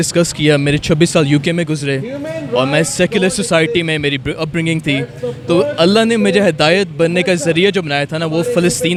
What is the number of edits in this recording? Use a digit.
0